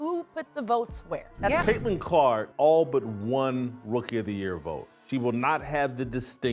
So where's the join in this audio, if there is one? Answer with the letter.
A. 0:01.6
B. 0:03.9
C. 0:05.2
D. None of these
A